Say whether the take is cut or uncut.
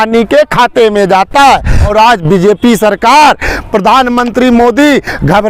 cut